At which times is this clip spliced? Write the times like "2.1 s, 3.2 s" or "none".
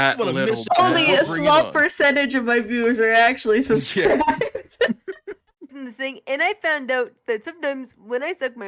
5.8 s